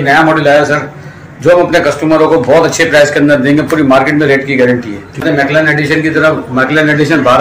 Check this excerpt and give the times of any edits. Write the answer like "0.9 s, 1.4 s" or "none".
5.2 s